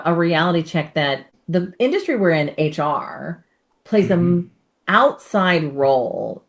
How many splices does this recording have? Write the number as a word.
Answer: one